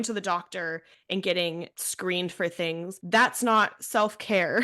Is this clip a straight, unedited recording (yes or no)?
no